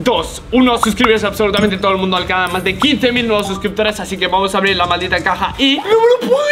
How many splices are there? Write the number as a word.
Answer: zero